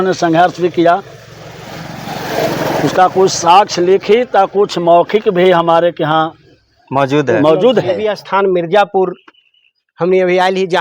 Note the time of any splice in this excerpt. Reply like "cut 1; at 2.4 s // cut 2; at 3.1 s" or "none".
cut 1; at 8.0 s

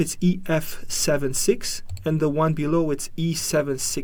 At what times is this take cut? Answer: none

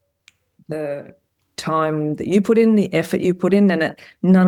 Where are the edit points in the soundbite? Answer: none

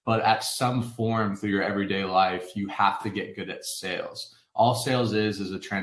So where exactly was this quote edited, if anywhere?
none

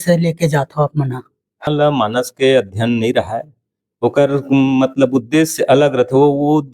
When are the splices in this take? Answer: cut 1; at 1.6 s

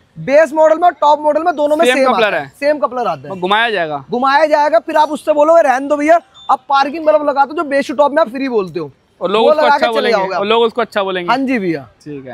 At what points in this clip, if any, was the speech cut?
none

